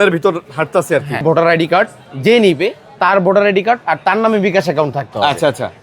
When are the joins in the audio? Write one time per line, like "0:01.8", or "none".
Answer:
0:01.2